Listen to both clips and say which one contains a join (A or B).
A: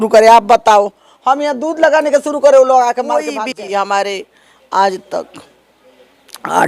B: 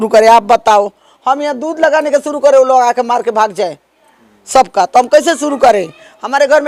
A